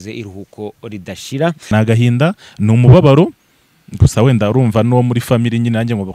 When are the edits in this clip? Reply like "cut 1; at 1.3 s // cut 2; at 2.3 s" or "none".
cut 1; at 1.7 s